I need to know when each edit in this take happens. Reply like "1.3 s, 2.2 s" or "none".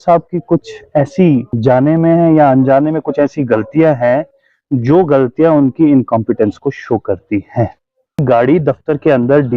1.5 s, 8.2 s